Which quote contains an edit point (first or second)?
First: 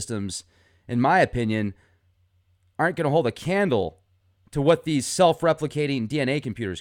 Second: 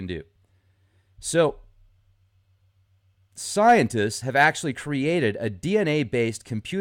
second